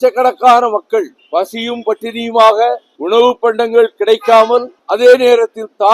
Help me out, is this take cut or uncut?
cut